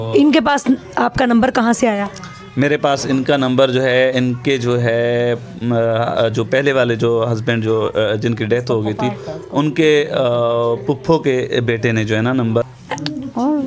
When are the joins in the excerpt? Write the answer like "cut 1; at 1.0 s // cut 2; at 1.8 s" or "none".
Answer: cut 1; at 12.6 s